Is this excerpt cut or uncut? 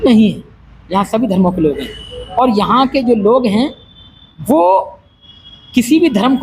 uncut